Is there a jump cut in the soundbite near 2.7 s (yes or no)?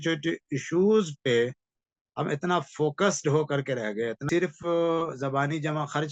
no